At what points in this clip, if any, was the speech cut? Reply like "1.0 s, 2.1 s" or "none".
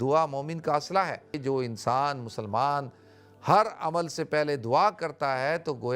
1.4 s

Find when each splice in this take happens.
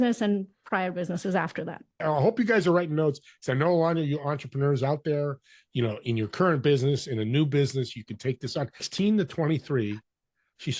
2.0 s, 8.9 s

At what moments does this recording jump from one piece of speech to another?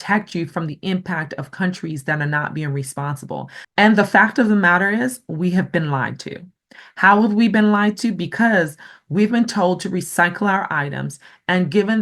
3.6 s

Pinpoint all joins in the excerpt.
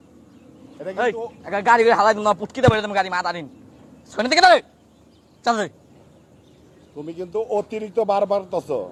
none

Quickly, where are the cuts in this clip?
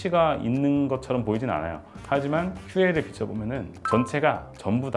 1.8 s

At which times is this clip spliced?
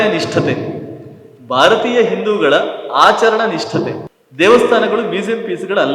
4.0 s

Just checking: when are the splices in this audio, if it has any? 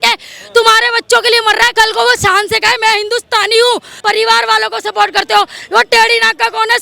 1.7 s, 3.9 s

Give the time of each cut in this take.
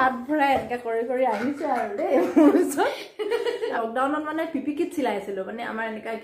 3.7 s

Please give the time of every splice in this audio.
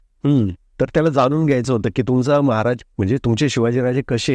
none

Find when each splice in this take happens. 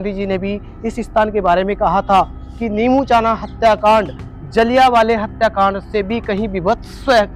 none

